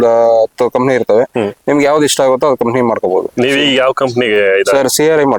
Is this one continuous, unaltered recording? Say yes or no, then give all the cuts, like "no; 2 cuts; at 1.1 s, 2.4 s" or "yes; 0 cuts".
yes; 0 cuts